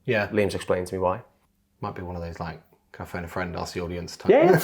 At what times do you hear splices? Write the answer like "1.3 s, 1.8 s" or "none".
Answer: 1.4 s